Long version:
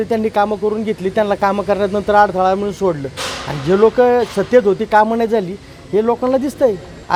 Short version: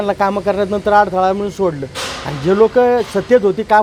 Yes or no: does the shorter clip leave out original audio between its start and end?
no